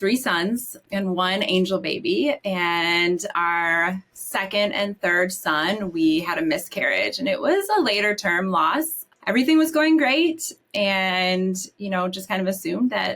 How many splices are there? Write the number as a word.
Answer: two